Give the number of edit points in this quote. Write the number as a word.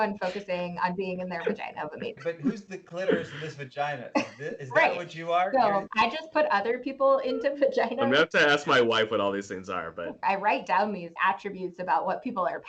two